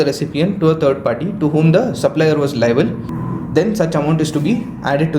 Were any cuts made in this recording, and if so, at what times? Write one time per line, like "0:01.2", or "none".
0:03.1